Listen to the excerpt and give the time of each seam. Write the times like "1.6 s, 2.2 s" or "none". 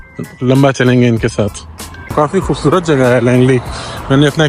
2.1 s